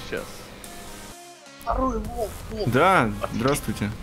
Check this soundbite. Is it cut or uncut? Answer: cut